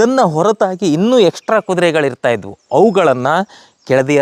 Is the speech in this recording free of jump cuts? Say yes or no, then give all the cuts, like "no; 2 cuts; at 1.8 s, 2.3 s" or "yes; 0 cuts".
yes; 0 cuts